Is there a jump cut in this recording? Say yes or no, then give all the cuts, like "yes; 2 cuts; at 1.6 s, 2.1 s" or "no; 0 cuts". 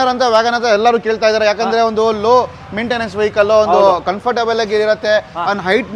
no; 0 cuts